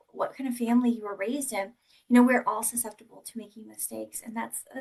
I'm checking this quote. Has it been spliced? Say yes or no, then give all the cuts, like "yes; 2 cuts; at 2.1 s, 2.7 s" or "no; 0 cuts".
no; 0 cuts